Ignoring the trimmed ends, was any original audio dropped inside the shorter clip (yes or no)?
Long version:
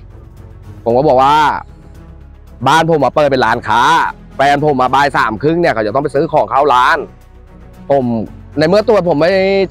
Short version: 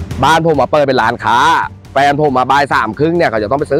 no